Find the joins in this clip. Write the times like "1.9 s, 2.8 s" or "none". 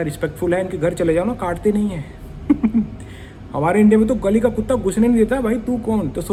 none